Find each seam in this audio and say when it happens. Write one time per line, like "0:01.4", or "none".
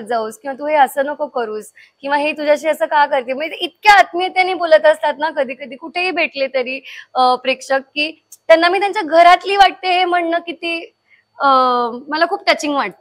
none